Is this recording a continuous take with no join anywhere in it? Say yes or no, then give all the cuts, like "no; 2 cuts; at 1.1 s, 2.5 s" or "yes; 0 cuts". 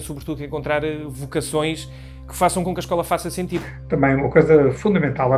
no; 1 cut; at 3.7 s